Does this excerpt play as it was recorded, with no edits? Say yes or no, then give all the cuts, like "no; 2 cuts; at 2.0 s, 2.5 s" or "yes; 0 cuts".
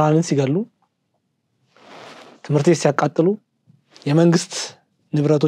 yes; 0 cuts